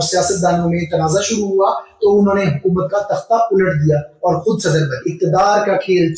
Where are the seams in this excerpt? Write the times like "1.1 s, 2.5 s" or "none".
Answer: 5.1 s

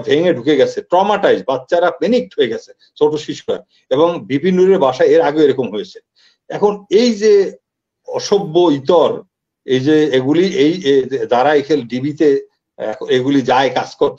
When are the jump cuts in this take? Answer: none

